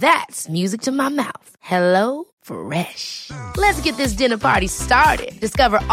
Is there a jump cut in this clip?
no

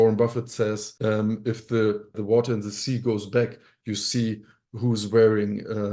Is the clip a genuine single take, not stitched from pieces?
yes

